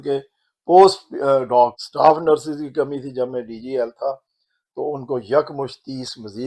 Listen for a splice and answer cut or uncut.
cut